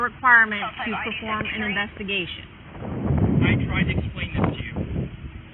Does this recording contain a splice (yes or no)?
yes